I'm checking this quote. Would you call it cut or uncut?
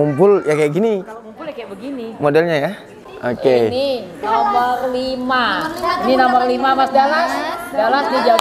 cut